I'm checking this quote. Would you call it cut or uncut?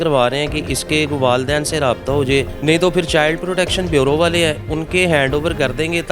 cut